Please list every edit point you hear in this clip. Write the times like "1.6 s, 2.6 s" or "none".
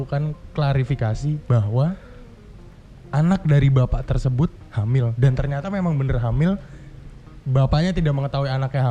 none